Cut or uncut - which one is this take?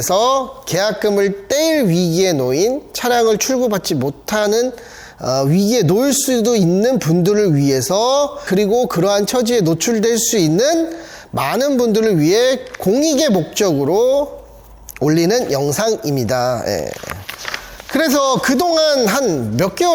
uncut